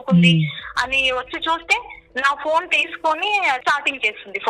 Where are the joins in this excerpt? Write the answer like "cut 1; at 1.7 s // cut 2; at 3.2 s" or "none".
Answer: cut 1; at 3.6 s